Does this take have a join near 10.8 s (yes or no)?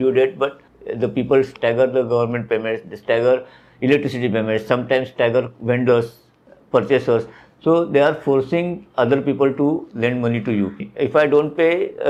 yes